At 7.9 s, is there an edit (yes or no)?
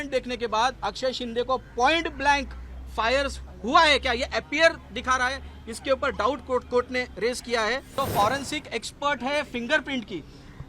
yes